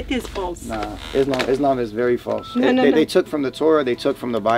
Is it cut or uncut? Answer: uncut